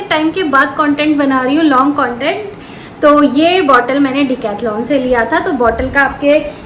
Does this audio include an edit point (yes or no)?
no